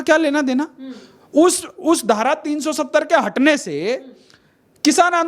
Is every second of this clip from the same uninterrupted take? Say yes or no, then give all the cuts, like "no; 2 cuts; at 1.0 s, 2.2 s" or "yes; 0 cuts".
yes; 0 cuts